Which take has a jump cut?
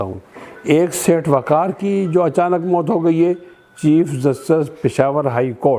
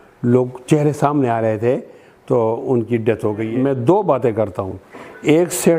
second; 1 cut; at 3.5 s

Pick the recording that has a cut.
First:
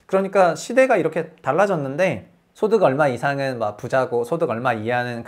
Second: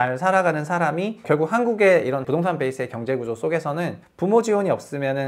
second; 3 cuts; at 1.2 s, 2.2 s, 4.0 s

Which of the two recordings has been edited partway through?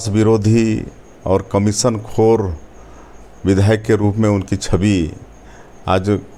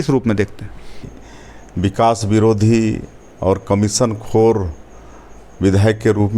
second; 1 cut; at 1.2 s

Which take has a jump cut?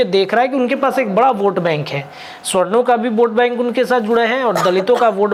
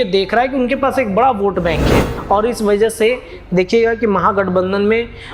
second; 1 cut; at 2.1 s

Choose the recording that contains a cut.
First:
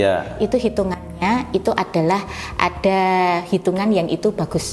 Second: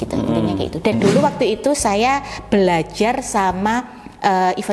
second; 1 cut; at 0.9 s

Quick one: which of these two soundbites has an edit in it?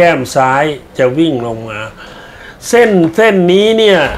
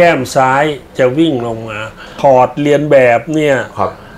second; 1 cut; at 2.1 s

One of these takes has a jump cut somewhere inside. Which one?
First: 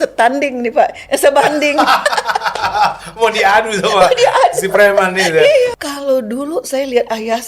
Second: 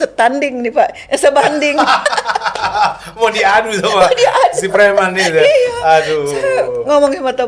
first; 1 cut; at 5.8 s

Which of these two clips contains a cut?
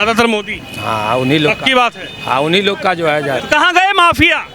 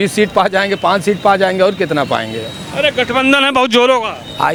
first; 1 cut; at 3.4 s

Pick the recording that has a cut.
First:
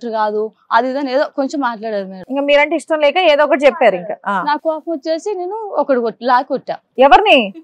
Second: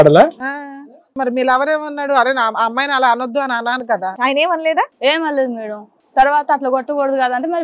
second; 2 cuts; at 1.1 s, 3.9 s

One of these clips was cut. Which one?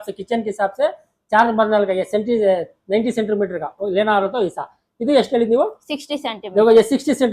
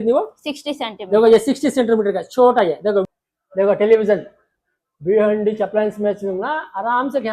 second; 1 cut; at 3.0 s

